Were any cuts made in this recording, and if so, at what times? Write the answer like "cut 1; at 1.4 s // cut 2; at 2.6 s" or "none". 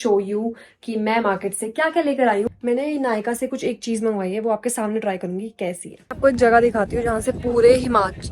cut 1; at 2.5 s // cut 2; at 6.1 s